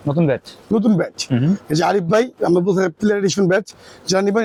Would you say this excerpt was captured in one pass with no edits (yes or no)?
yes